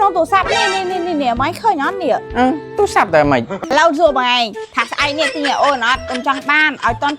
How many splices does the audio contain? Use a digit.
1